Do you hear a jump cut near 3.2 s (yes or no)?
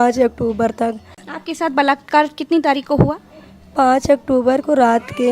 no